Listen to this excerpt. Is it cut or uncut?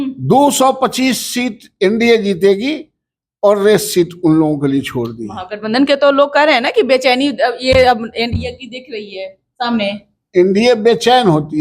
uncut